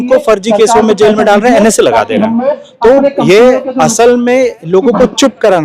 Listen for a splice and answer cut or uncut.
uncut